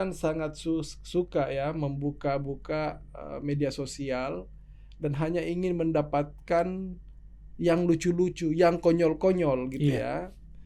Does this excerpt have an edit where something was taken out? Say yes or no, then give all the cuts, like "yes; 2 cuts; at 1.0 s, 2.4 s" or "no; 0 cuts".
no; 0 cuts